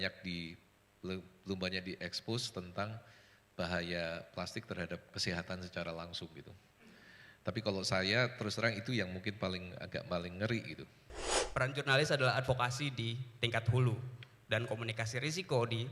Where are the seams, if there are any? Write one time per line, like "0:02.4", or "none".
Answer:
0:11.4